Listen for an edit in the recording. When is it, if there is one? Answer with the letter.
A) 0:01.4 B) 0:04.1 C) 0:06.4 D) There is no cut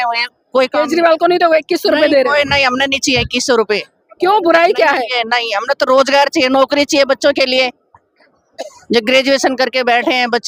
D